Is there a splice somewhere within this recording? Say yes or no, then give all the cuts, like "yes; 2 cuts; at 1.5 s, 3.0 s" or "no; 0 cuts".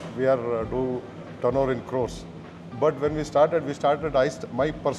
no; 0 cuts